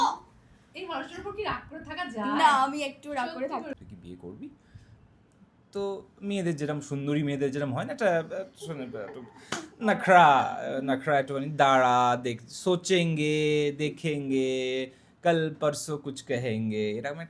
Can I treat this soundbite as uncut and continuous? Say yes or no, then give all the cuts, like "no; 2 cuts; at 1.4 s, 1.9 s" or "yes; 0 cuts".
no; 1 cut; at 3.8 s